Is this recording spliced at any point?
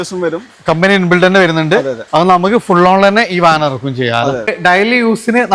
yes; 1 cut; at 4.5 s

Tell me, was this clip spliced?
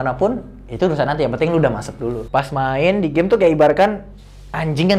yes; 1 cut; at 2.2 s

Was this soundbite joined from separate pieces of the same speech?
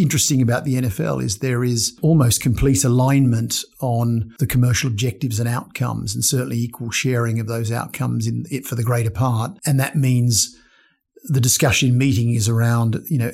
yes; 3 cuts; at 1.9 s, 4.3 s, 9.6 s

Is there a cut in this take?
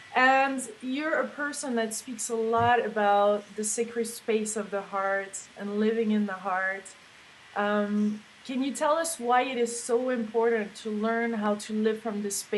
yes; 1 cut; at 2.9 s

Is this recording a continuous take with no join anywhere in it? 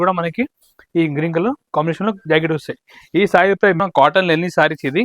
no; 1 cut; at 3.8 s

